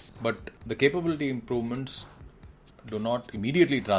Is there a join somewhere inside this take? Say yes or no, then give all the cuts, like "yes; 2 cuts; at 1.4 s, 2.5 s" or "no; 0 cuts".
no; 0 cuts